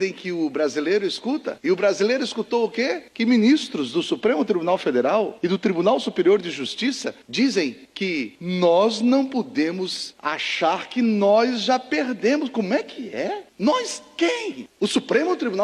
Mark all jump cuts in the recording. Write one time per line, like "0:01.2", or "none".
none